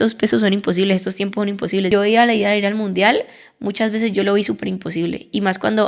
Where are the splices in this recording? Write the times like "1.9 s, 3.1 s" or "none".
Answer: 1.9 s